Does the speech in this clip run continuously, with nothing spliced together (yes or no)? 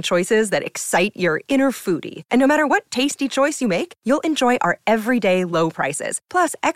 yes